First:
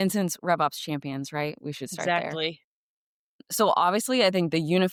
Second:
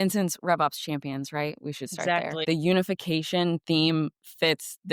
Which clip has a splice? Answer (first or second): second